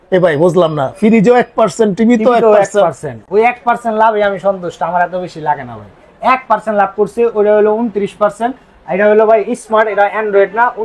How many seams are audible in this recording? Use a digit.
0